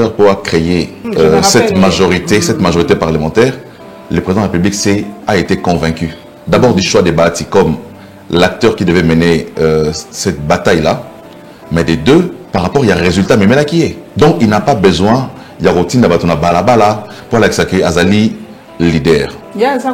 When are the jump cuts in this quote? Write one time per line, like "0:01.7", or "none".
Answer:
0:01.0
0:12.4
0:14.0